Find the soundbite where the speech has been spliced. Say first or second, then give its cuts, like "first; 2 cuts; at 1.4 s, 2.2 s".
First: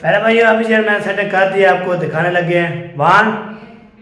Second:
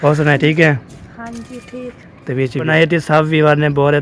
second; 1 cut; at 2.7 s